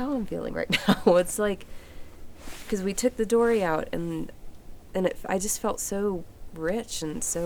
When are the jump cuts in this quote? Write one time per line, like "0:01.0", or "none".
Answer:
none